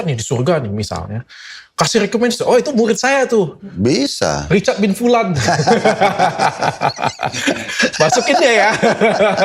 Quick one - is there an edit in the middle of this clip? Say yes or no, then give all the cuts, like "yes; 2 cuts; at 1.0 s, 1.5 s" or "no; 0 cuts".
no; 0 cuts